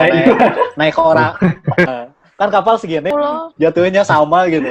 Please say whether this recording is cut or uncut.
cut